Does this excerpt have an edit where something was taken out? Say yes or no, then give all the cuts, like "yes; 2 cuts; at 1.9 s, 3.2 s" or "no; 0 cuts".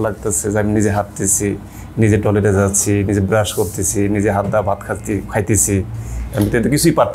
no; 0 cuts